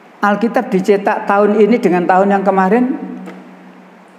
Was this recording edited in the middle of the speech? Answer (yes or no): no